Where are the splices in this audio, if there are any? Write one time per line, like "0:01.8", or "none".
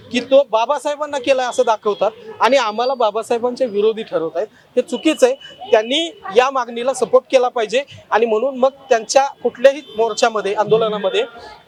none